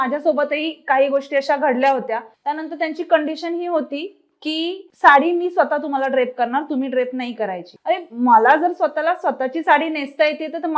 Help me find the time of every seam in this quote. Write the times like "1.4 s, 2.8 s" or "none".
2.3 s

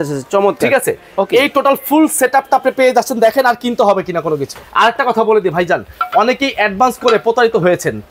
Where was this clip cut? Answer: 4.6 s

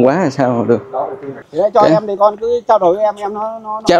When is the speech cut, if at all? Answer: 1.4 s

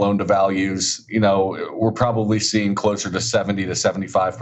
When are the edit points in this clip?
none

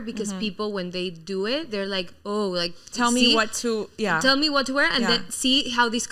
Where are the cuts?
none

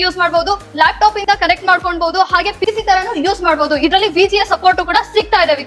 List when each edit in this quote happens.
none

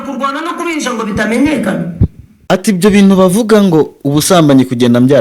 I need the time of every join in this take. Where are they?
2.3 s

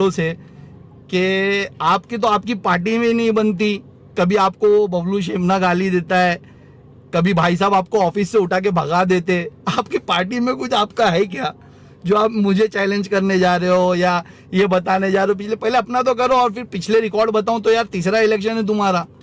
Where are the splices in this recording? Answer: none

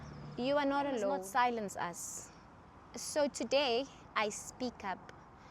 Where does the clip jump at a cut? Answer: 1.2 s

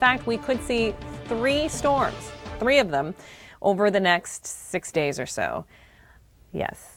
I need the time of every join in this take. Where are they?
none

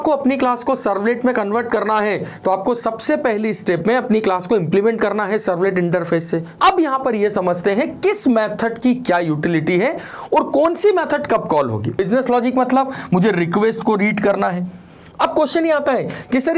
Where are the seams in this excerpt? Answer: 6.5 s, 12.0 s

